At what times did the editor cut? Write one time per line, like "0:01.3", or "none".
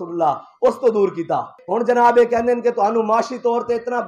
0:01.6

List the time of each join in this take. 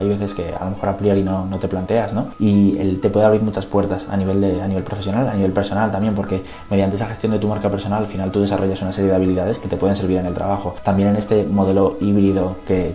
0:02.3
0:10.7

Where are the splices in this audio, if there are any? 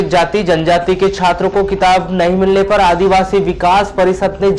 none

